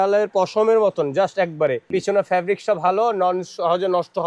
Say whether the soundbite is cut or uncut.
cut